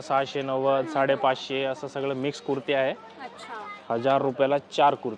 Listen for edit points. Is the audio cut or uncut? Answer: uncut